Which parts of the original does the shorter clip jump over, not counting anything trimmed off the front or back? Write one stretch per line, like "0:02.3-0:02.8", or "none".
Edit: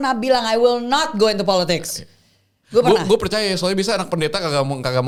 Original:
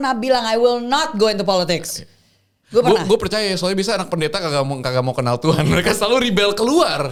none